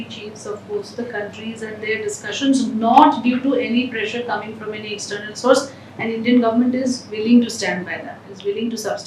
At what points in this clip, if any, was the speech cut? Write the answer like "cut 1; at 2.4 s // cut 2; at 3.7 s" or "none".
none